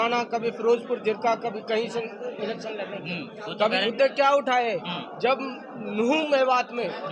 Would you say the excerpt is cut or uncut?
cut